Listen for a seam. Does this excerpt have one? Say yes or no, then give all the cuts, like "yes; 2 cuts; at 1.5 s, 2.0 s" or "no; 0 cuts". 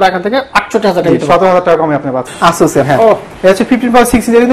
yes; 2 cuts; at 2.2 s, 3.3 s